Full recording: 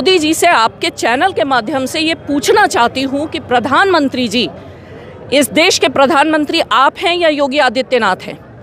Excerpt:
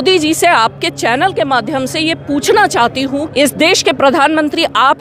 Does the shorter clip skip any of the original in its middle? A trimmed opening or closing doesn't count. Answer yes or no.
yes